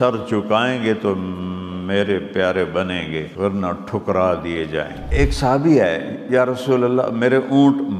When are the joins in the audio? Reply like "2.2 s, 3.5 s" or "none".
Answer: 3.3 s, 5.0 s